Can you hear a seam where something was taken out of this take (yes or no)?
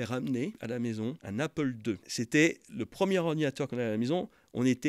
yes